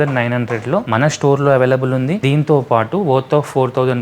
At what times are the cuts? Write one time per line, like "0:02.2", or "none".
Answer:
0:00.9
0:02.2